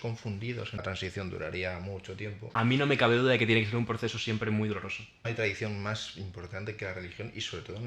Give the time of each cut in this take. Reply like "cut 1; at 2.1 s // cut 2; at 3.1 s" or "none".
cut 1; at 0.8 s // cut 2; at 2.4 s // cut 3; at 5.2 s